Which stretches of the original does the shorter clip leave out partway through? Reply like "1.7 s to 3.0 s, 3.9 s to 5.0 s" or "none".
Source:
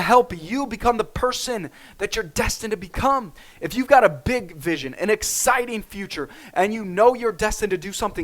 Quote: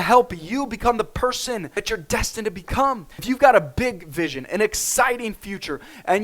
1.7 s to 1.9 s, 3.4 s to 3.6 s